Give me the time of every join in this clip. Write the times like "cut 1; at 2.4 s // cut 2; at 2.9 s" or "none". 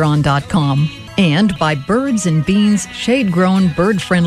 cut 1; at 1.0 s

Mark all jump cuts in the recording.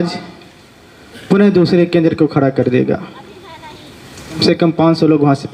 cut 1; at 4.4 s

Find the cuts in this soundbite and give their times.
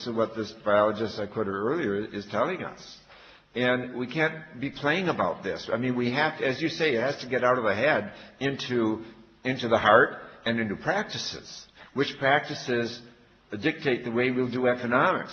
cut 1; at 10.2 s

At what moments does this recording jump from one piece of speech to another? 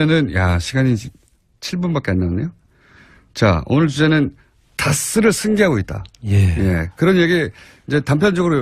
cut 1; at 4.7 s

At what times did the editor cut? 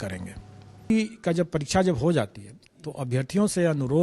cut 1; at 0.9 s

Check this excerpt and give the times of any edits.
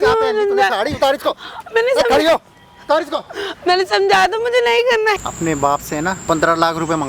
cut 1; at 5.2 s // cut 2; at 6.2 s

